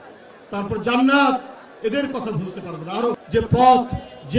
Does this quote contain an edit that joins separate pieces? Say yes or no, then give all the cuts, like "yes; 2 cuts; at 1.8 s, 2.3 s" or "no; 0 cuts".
yes; 1 cut; at 3.2 s